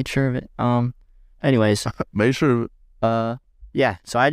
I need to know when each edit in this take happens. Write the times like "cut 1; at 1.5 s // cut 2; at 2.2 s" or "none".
none